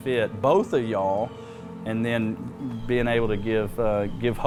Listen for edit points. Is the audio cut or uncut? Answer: uncut